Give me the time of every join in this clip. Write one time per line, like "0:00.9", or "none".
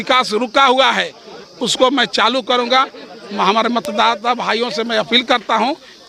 none

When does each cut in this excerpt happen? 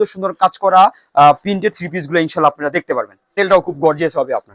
0:03.4

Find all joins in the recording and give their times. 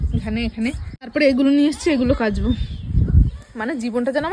0:01.1

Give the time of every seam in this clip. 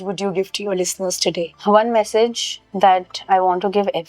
0:01.5

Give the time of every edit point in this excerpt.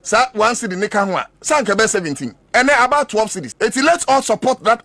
0:03.4

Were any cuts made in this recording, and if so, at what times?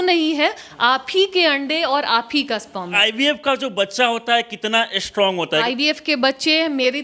0:03.0
0:05.6

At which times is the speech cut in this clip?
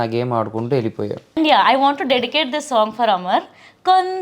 0:01.3

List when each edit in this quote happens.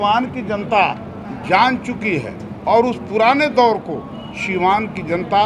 none

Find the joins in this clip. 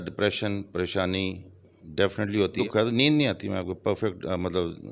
0:02.6

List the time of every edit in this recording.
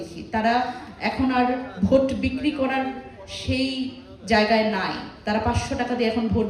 none

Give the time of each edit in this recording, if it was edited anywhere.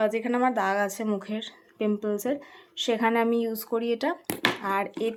none

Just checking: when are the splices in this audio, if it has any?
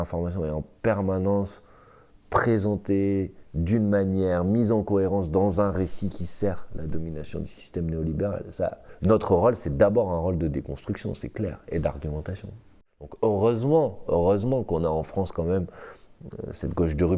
0:08.9
0:12.7

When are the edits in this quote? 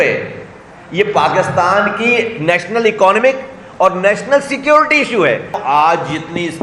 0:05.6

